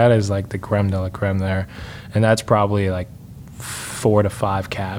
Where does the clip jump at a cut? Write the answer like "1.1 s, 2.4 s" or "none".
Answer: none